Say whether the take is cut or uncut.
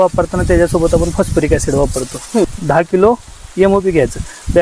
cut